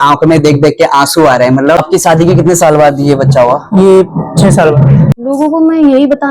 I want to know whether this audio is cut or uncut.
cut